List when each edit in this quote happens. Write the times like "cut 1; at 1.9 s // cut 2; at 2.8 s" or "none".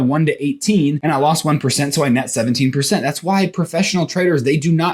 cut 1; at 1.0 s